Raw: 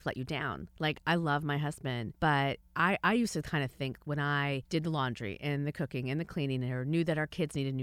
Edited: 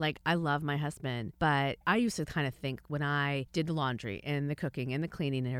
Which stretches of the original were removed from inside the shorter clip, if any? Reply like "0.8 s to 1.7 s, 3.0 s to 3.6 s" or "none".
2.6 s to 3.0 s